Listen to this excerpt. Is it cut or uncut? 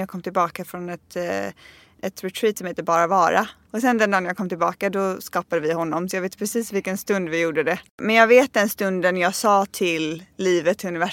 cut